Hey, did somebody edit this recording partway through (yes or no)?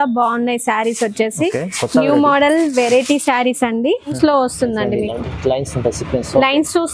yes